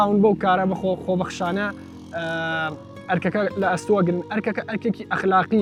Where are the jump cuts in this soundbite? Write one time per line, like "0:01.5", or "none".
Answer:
none

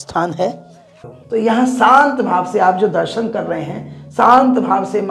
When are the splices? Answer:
0:01.0

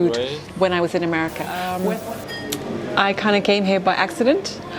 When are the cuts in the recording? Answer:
0:01.8

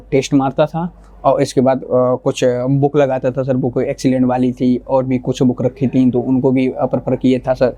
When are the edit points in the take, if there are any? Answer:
none

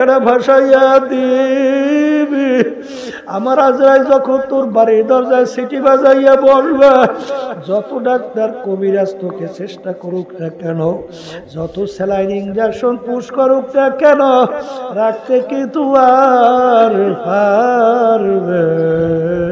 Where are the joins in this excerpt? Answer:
none

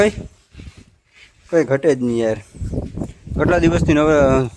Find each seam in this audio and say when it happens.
none

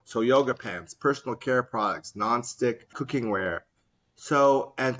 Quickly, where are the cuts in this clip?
0:03.0

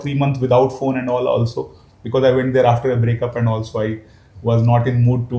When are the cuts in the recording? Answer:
none

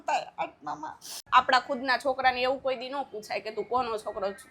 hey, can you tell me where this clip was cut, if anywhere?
0:01.2

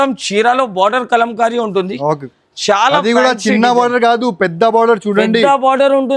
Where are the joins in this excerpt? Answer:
none

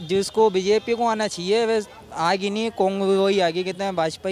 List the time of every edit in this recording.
none

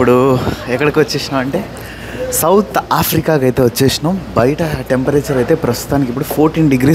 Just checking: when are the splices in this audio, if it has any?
none

